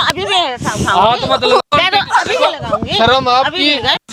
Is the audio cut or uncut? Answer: uncut